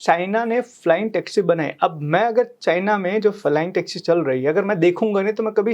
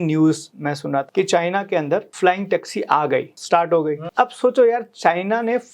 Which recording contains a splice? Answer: second; 4 cuts; at 1.1 s, 2.1 s, 3.4 s, 4.0 s

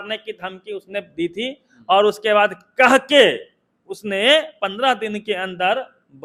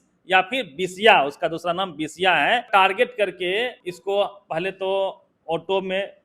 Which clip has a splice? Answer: second; 2 cuts; at 2.7 s, 3.9 s

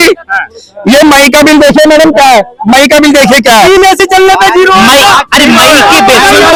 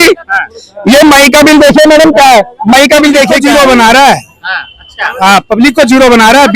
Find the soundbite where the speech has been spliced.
second; 1 cut; at 3.3 s

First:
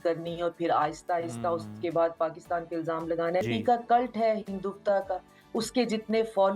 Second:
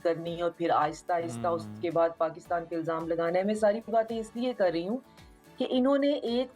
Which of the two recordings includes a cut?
first; 1 cut; at 3.4 s

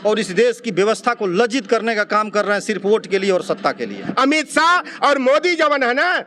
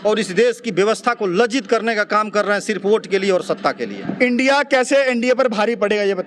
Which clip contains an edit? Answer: first; 1 cut; at 4.0 s

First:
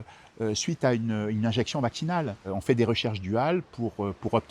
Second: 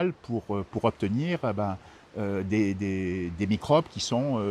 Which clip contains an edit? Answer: first; 1 cut; at 2.5 s

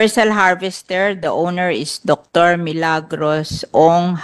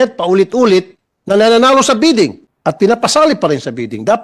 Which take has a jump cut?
second; 1 cut; at 2.5 s

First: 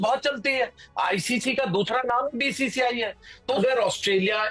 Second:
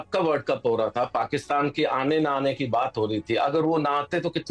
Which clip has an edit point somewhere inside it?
first; 1 cut; at 3.6 s

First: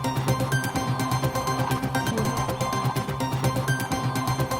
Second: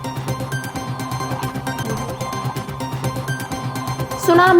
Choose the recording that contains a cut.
first; 1 cut; at 1.2 s

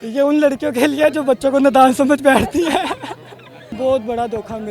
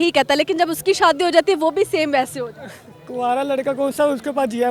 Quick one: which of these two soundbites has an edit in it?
first; 1 cut; at 3.7 s

